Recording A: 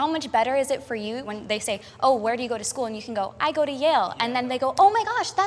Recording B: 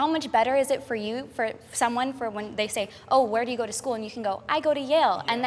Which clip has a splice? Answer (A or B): A